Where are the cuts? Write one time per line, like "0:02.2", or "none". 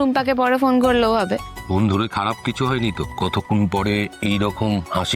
0:03.1

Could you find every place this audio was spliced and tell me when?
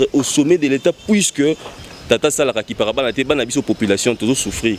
0:01.7

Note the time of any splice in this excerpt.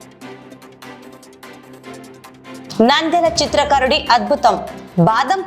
0:02.3

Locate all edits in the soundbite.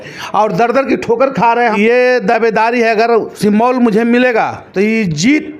0:01.7
0:03.3
0:04.6

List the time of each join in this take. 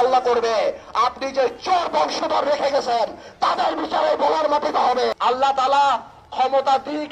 0:05.1

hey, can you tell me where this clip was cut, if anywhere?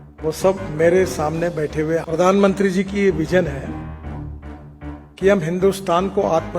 0:02.0

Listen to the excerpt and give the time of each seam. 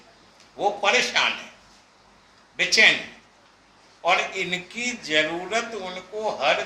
none

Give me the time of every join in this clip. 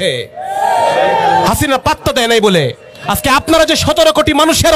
none

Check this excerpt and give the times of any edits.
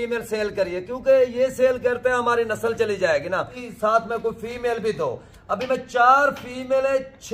0:03.6

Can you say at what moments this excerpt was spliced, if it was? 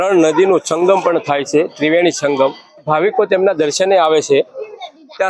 0:02.8

